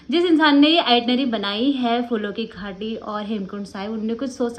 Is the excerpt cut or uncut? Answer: uncut